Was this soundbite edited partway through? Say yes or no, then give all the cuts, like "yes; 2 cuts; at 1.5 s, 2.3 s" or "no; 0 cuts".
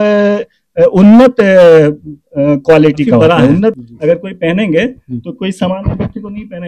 yes; 1 cut; at 3.8 s